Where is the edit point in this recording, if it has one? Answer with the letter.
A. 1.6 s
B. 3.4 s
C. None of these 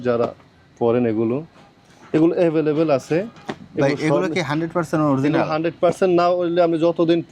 C